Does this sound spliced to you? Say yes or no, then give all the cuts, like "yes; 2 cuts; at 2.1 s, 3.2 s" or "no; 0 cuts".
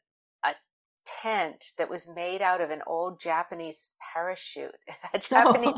no; 0 cuts